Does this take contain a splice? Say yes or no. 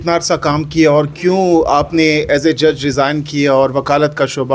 no